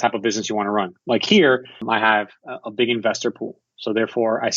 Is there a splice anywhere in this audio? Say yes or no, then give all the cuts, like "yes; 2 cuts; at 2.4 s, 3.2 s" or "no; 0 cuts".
yes; 2 cuts; at 0.9 s, 1.8 s